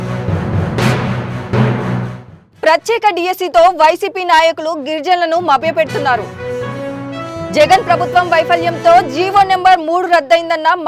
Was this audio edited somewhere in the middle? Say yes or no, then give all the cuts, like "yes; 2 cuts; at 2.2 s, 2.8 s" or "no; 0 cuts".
yes; 1 cut; at 1.8 s